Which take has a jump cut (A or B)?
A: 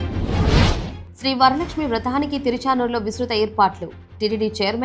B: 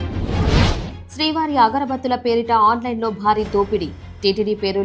A